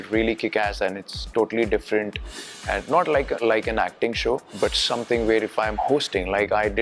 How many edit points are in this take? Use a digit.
2